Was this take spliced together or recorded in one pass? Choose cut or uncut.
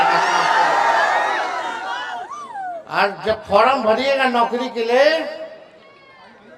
uncut